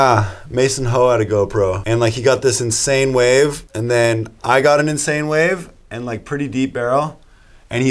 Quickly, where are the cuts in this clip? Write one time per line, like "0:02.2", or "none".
0:01.8
0:03.7